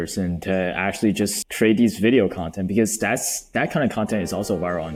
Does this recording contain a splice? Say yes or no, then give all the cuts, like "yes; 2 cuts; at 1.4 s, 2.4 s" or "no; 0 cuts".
no; 0 cuts